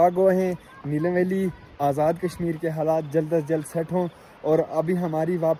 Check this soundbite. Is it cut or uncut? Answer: uncut